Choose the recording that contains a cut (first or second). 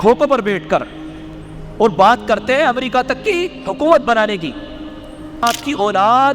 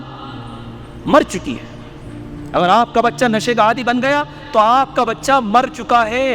first